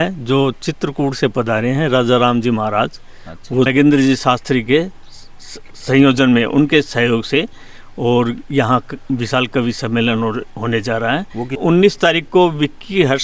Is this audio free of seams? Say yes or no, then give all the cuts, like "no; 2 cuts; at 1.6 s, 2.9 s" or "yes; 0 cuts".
no; 2 cuts; at 3.7 s, 11.6 s